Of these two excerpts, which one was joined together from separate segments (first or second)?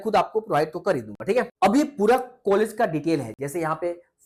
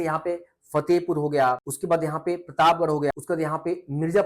second